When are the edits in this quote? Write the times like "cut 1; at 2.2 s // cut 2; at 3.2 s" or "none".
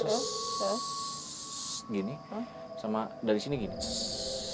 none